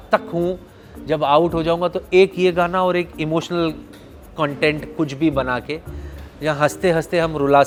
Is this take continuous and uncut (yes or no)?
yes